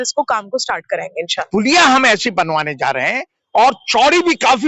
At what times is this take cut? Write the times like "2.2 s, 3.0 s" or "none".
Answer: 1.4 s

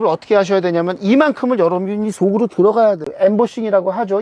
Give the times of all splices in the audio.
3.1 s

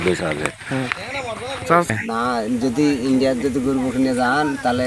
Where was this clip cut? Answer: 1.9 s

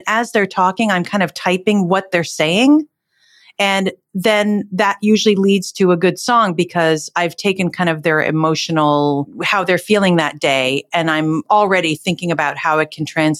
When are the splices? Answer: 9.4 s

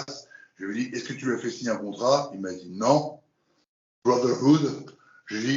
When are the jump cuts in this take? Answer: none

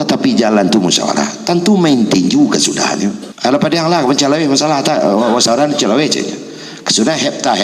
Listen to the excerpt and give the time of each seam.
3.3 s

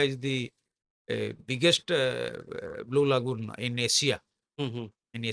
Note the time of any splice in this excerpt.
none

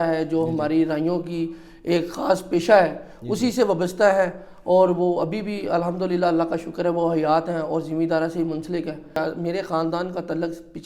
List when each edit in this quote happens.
9.2 s

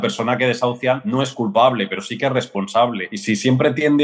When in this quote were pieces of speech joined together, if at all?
1.0 s, 3.1 s

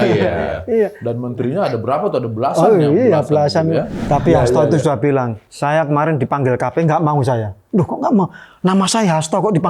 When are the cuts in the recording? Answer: 4.0 s

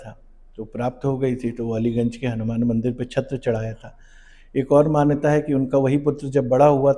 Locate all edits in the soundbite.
none

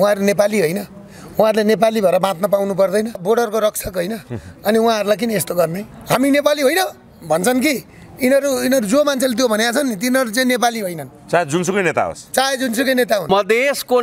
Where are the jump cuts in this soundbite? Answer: 3.1 s, 5.9 s, 13.2 s

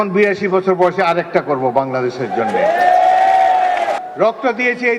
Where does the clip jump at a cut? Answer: 4.0 s

